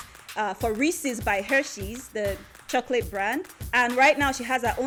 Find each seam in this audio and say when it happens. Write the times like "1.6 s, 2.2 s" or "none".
none

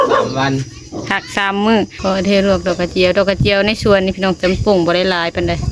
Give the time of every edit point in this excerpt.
2.0 s

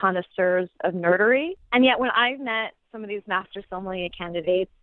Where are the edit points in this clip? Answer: 1.6 s

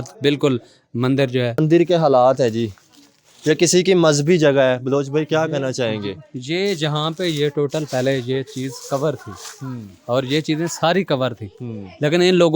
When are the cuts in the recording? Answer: 1.6 s

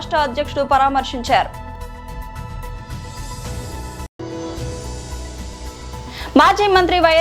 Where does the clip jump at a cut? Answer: 1.7 s, 3.8 s, 6.1 s

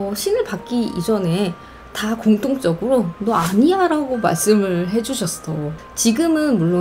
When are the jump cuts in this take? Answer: 5.7 s

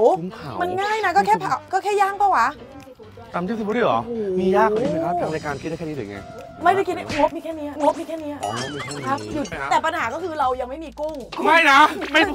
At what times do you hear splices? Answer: 9.5 s

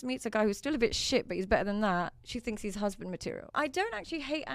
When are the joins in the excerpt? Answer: 3.5 s

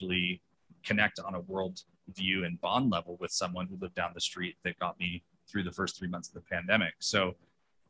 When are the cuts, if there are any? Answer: none

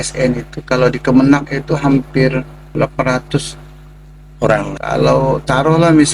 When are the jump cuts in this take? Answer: 2.8 s, 4.8 s

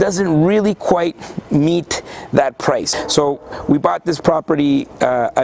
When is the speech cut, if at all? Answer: 2.9 s

